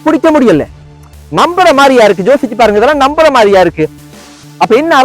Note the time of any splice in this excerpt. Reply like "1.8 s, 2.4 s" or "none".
4.0 s